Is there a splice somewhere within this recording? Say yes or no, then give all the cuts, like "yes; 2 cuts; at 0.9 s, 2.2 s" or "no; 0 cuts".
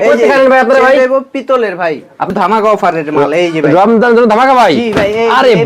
yes; 1 cut; at 2.3 s